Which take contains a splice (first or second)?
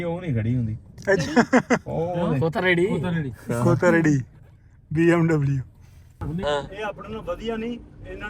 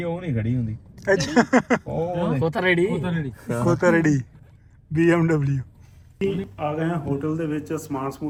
first